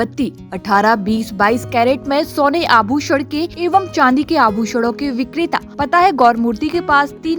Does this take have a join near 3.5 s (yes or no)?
yes